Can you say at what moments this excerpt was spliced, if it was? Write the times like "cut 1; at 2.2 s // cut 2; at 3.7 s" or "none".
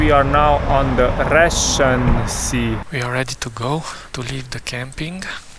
cut 1; at 2.8 s // cut 2; at 4.0 s